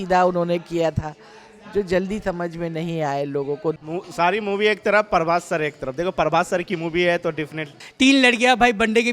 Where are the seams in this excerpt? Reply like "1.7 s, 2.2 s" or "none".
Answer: 3.8 s, 7.8 s